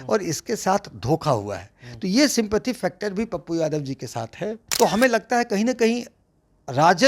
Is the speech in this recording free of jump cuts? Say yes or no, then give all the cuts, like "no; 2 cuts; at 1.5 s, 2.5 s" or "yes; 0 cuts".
no; 1 cut; at 4.6 s